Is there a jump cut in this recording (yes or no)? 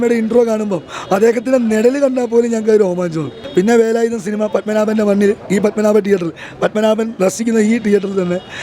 yes